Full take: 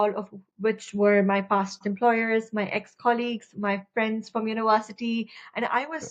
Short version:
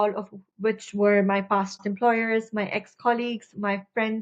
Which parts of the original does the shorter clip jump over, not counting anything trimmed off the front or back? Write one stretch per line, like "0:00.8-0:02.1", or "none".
none